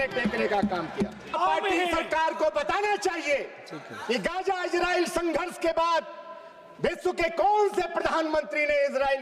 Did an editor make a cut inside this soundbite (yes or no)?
yes